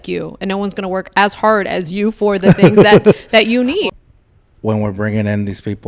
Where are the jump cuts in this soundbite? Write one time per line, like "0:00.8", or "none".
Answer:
0:03.8